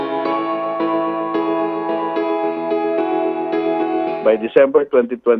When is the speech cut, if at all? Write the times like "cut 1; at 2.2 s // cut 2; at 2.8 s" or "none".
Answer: cut 1; at 4.2 s